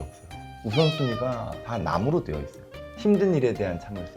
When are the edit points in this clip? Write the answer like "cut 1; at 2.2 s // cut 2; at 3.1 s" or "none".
cut 1; at 1.5 s // cut 2; at 2.8 s